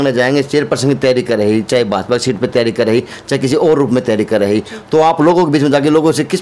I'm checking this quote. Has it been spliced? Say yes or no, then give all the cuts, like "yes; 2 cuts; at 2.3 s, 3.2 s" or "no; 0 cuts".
no; 0 cuts